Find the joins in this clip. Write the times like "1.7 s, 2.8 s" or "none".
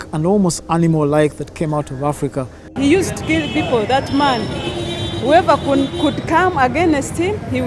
2.6 s